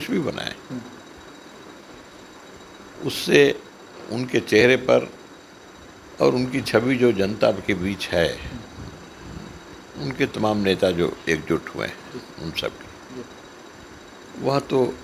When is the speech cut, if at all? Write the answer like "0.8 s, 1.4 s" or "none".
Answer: none